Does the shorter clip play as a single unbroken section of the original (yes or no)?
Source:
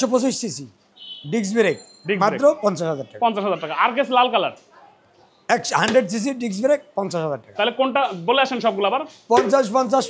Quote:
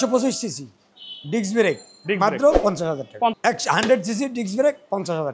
no